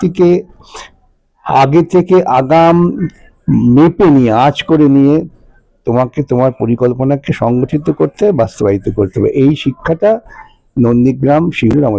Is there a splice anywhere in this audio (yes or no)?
no